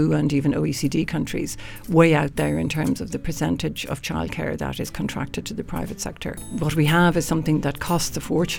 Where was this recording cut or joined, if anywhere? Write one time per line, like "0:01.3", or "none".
0:06.4